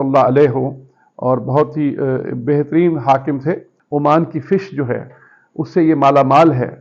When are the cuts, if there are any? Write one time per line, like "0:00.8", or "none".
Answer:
0:03.7